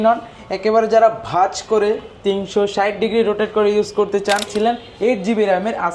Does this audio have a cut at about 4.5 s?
yes; 1 cut; at 4.5 s

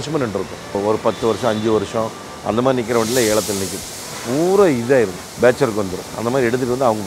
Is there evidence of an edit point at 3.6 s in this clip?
no; 3 cuts; at 0.8 s, 5.2 s, 6.0 s

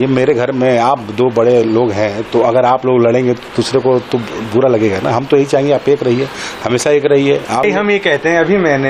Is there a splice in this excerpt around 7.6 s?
yes; 1 cut; at 7.6 s

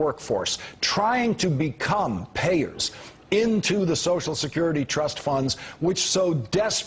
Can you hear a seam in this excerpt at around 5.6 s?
no; 1 cut; at 3.5 s

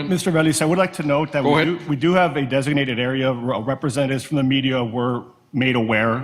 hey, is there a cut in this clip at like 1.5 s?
no; 0 cuts

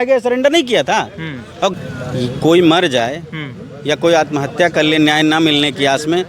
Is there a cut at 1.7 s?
yes; 1 cut; at 1.7 s

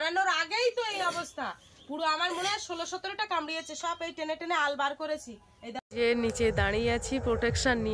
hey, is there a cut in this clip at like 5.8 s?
yes; 1 cut; at 5.8 s

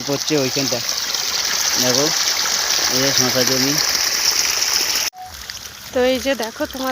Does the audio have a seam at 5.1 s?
yes; 1 cut; at 5.1 s

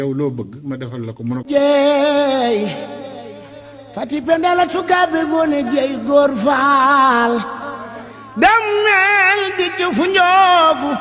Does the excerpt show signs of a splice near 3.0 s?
no; 1 cut; at 1.4 s

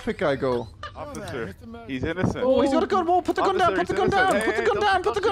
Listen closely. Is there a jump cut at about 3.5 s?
no; 1 cut; at 1.1 s

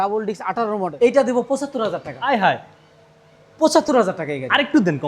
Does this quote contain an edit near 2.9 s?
no; 1 cut; at 0.9 s

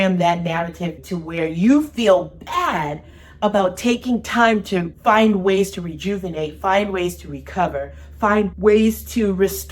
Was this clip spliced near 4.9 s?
yes; 2 cuts; at 4.9 s, 8.5 s

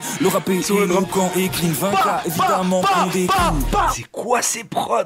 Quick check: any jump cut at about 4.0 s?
yes; 1 cut; at 4.0 s

